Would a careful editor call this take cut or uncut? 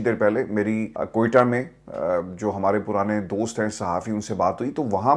cut